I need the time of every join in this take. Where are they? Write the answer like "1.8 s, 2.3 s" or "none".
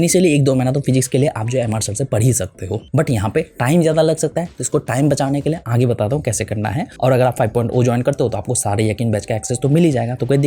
none